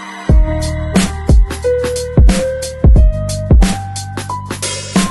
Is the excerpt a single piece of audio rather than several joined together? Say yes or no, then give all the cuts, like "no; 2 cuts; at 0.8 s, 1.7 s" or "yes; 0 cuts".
yes; 0 cuts